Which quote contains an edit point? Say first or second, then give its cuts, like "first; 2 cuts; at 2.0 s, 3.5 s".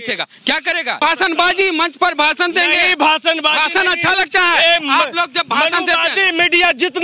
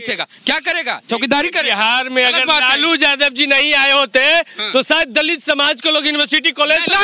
first; 1 cut; at 1.0 s